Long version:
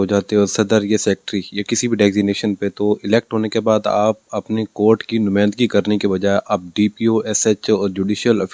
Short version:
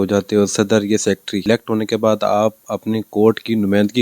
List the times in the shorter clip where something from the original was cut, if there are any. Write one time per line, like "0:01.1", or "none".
0:01.4